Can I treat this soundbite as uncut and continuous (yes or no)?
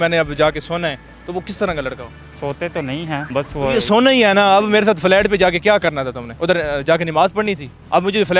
yes